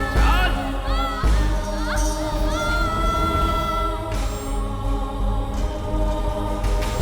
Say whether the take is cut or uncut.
uncut